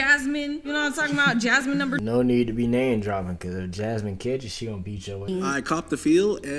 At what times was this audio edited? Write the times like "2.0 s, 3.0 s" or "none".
2.0 s, 5.3 s